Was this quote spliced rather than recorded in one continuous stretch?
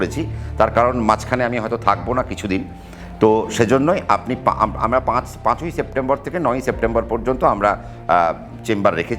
no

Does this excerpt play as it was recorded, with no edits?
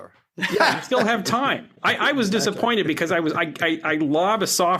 yes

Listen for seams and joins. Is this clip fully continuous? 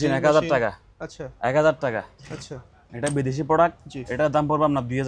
yes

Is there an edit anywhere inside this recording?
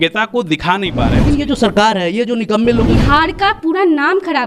yes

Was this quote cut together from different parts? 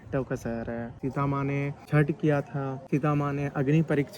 yes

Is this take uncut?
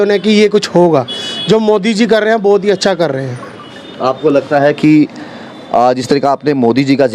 yes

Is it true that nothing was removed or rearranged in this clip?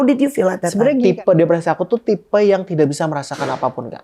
no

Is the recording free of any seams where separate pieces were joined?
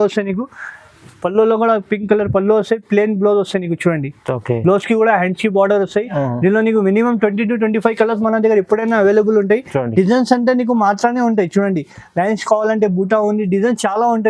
yes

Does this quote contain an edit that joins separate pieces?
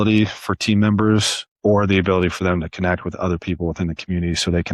no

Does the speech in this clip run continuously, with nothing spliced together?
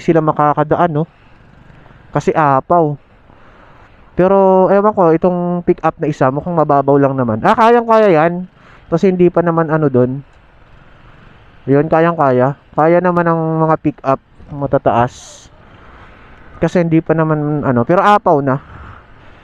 yes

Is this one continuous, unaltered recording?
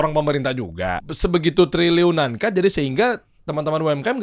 no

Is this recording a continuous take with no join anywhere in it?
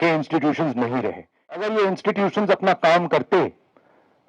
no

